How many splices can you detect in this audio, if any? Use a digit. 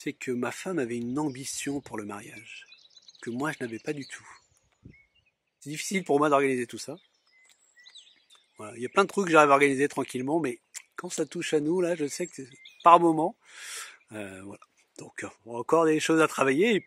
1